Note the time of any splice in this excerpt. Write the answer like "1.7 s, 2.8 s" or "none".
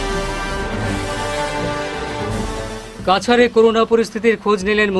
none